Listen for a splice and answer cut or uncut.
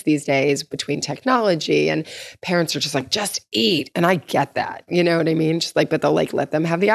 uncut